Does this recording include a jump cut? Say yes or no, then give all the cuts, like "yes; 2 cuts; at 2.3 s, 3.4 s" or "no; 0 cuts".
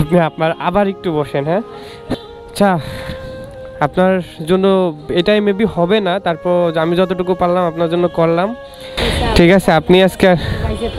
yes; 1 cut; at 2.1 s